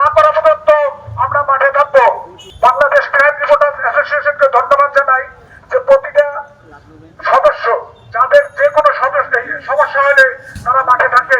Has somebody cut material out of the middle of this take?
no; 0 cuts

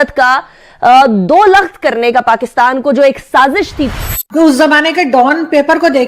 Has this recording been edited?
yes; 1 cut; at 4.1 s

